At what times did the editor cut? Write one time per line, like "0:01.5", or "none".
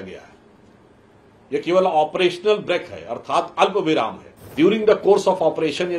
0:04.5